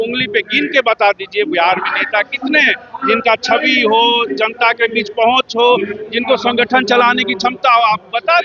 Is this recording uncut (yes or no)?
yes